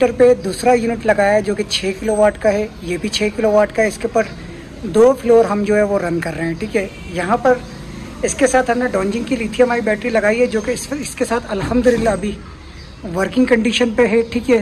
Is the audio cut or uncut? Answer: uncut